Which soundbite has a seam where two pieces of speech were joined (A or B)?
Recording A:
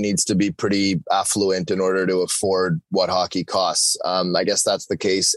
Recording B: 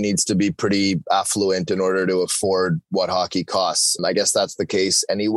B